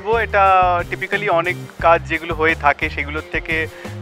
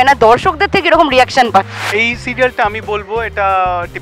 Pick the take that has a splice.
second; 1 cut; at 1.8 s

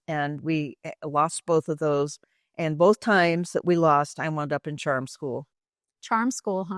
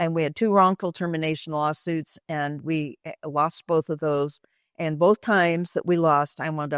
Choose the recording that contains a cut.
first; 1 cut; at 5.5 s

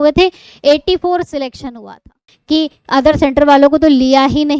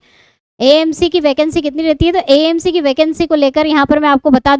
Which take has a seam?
first; 1 cut; at 2.3 s

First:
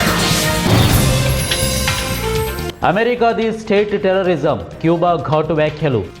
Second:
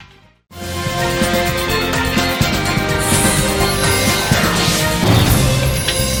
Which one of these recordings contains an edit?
first; 1 cut; at 2.8 s

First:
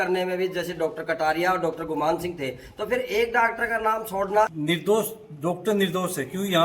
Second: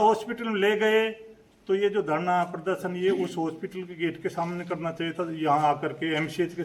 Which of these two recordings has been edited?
first; 1 cut; at 4.5 s

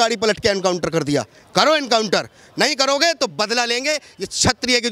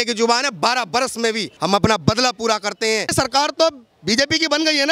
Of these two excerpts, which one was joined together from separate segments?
second; 2 cuts; at 1.5 s, 3.1 s

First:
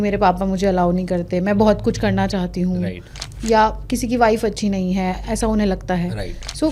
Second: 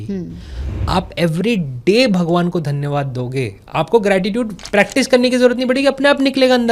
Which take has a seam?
second; 1 cut; at 4.6 s

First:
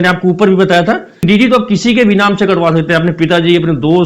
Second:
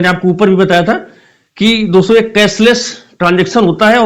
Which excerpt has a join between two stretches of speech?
first; 1 cut; at 1.2 s

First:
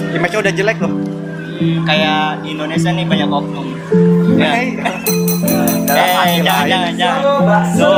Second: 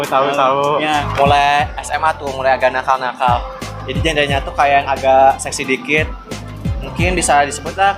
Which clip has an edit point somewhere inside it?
second; 1 cut; at 1.1 s

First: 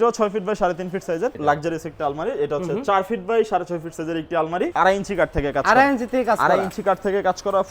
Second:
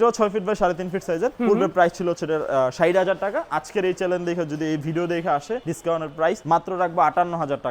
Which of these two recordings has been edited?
first; 2 cuts; at 1.4 s, 4.7 s

